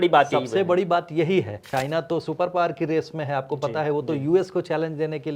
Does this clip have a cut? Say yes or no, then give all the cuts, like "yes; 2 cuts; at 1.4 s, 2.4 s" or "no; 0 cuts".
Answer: yes; 1 cut; at 1.7 s